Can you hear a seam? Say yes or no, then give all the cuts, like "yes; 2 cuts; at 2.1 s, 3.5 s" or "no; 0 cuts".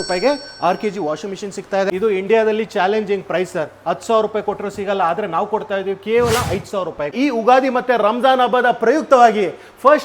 yes; 2 cuts; at 1.9 s, 7.1 s